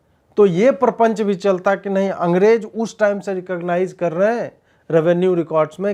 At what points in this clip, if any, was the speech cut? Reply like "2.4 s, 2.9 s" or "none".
none